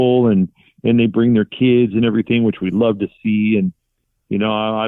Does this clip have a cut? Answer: yes; 1 cut; at 3.9 s

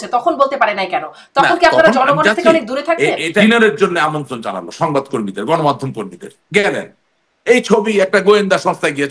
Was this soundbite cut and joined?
yes; 1 cut; at 3.4 s

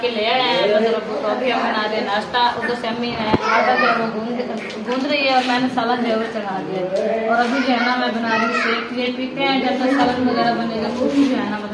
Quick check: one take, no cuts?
yes; 0 cuts

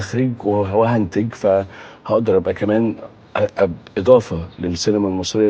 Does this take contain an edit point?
no; 0 cuts

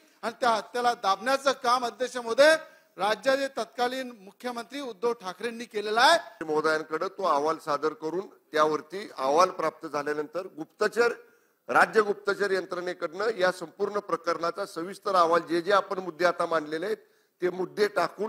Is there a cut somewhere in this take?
yes; 1 cut; at 6.4 s

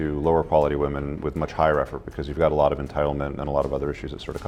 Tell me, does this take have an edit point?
no; 0 cuts

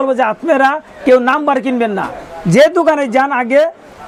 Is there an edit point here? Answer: no; 0 cuts

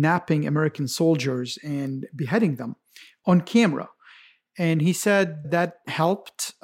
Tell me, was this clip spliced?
no; 0 cuts

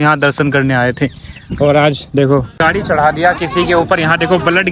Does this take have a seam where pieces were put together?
yes; 1 cut; at 2.5 s

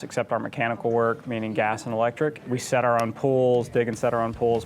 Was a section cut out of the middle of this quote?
yes; 1 cut; at 2.4 s

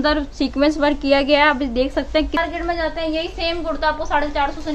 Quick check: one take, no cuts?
no; 1 cut; at 2.4 s

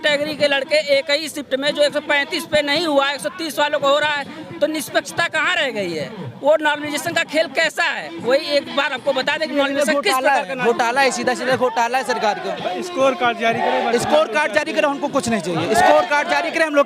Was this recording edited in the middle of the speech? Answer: no; 0 cuts

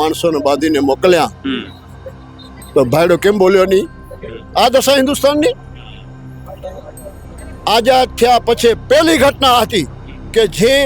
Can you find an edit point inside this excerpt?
no; 0 cuts

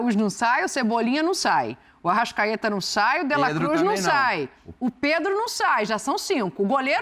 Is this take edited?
no; 0 cuts

